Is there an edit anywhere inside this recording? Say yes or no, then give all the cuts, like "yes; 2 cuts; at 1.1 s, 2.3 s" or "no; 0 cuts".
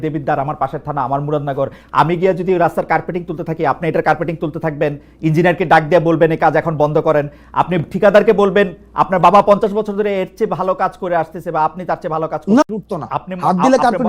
yes; 1 cut; at 12.6 s